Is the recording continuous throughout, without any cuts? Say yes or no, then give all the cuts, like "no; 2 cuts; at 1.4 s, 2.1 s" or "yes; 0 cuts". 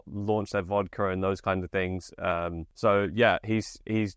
no; 1 cut; at 2.6 s